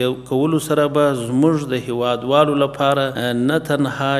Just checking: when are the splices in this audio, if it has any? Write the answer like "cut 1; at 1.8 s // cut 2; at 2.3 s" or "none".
cut 1; at 3.2 s